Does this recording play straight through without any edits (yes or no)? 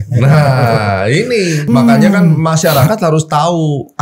yes